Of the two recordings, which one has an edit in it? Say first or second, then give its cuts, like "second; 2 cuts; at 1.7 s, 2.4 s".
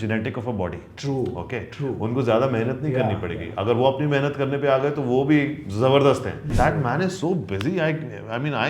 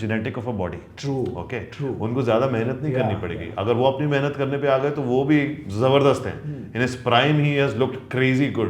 first; 1 cut; at 6.5 s